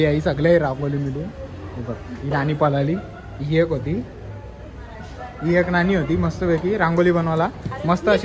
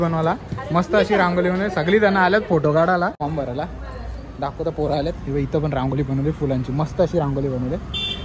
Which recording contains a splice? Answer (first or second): second